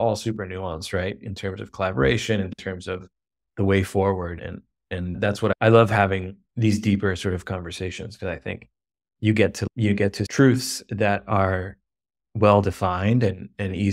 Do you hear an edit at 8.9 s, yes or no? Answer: no